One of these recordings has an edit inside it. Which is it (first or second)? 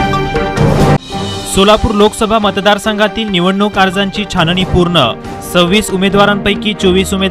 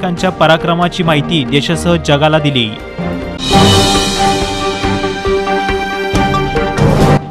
first